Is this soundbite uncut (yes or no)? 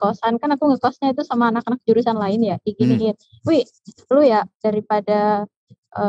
yes